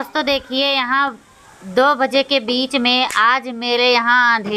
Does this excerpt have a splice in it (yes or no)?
no